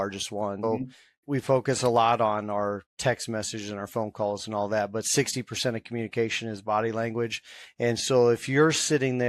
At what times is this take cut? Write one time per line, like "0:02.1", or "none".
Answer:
none

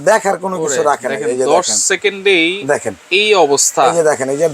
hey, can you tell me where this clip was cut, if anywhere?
none

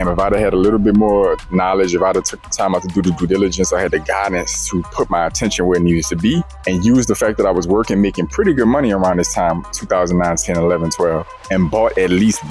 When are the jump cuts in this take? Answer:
none

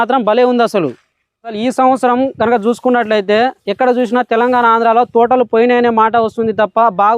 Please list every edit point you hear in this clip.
0:01.5

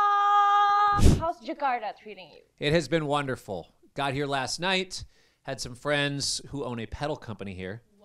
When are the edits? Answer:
0:01.0

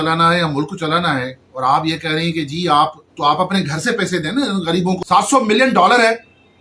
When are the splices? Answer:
0:05.0

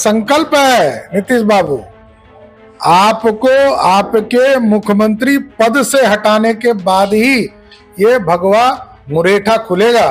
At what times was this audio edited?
none

